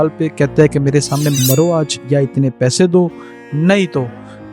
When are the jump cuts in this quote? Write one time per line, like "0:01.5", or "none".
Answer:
0:01.4